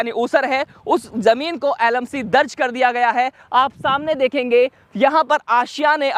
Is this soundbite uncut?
yes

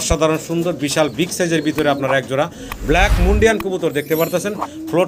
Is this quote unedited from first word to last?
yes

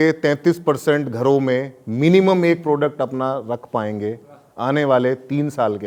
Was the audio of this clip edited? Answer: no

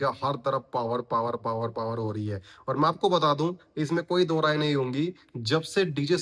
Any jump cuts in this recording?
no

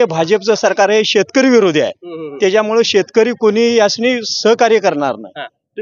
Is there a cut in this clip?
no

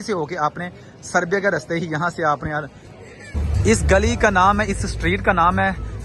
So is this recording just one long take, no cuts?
no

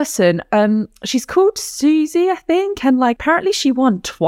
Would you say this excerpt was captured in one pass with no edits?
no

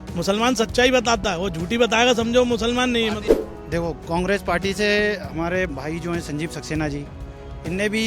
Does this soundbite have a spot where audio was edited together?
yes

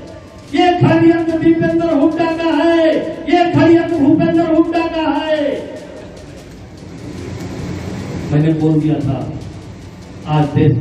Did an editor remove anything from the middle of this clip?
no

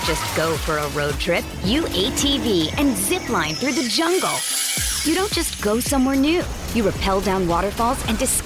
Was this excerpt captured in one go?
yes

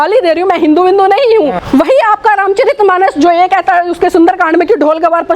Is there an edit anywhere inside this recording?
yes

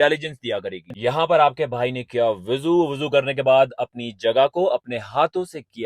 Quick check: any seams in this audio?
yes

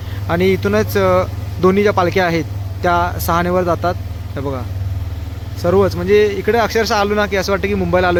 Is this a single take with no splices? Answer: yes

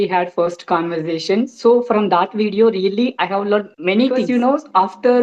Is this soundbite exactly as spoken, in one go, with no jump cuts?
no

